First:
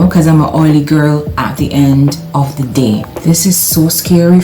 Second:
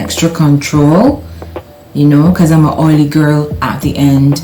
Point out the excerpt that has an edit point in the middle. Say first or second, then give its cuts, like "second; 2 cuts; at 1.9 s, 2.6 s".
first; 1 cut; at 3.1 s